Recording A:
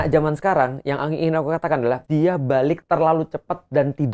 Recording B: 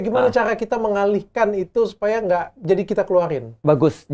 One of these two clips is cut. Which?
A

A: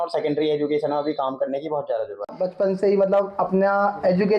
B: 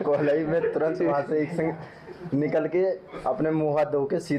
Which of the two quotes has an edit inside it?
A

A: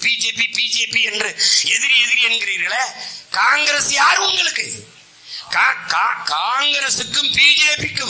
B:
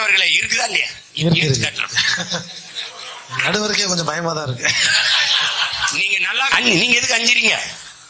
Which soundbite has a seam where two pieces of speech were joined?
B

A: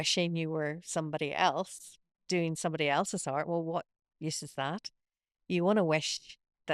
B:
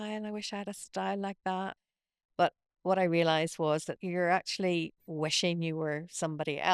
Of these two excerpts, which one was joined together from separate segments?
B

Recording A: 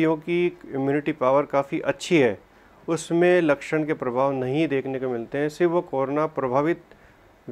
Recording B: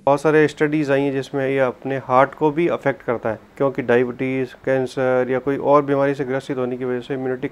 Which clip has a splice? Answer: B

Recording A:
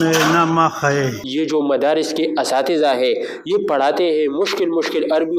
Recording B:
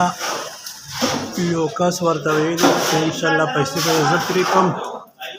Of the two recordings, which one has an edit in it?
A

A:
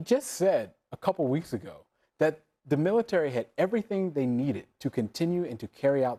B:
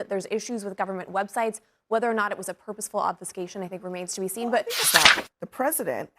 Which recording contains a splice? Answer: B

